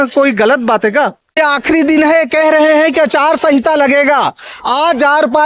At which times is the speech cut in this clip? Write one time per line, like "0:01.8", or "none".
0:01.4